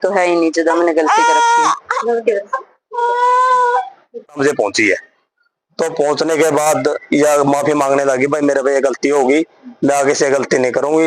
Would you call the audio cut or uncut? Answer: cut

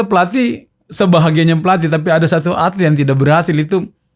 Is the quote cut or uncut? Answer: uncut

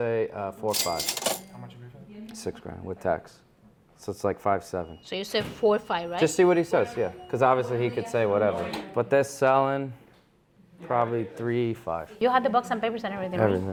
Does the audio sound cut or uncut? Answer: uncut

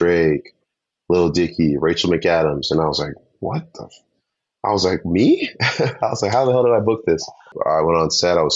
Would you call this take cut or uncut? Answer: cut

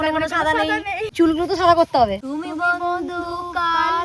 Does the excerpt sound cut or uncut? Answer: cut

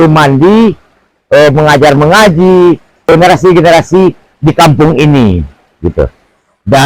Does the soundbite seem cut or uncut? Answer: cut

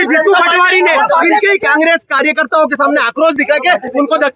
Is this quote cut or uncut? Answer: uncut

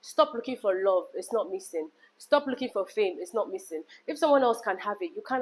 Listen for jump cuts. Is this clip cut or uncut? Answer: uncut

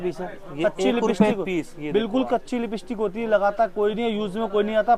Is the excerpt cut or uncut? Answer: uncut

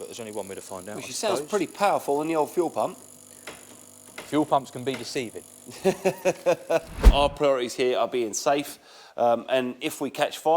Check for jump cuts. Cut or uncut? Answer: cut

